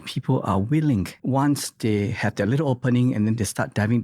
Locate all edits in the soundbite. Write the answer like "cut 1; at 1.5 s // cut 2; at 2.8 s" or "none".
cut 1; at 1.1 s